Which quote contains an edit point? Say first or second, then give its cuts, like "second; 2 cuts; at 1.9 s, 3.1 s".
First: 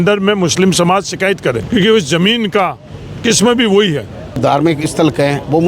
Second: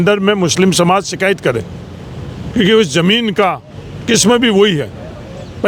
first; 2 cuts; at 1.6 s, 4.4 s